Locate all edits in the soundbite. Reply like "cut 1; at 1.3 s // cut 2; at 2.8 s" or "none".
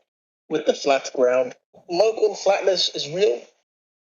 cut 1; at 1.8 s